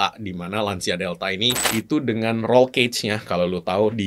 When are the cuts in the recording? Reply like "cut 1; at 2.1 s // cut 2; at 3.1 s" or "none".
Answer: cut 1; at 1.5 s